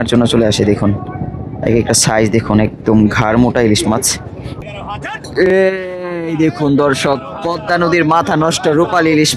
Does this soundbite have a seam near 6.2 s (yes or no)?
no